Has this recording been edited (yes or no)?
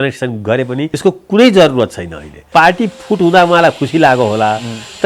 yes